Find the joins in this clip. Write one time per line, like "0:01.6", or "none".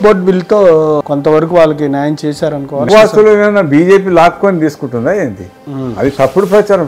0:01.0
0:02.9